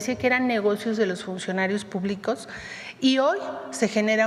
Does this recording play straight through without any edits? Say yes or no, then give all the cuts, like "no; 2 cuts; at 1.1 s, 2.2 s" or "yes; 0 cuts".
yes; 0 cuts